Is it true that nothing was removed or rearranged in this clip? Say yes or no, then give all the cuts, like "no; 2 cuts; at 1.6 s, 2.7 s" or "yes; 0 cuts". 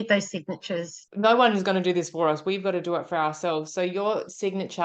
no; 1 cut; at 1.0 s